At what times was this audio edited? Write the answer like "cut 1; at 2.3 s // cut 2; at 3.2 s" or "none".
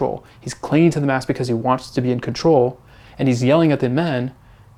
none